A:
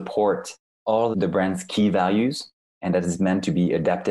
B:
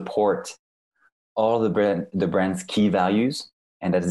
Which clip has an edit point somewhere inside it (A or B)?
A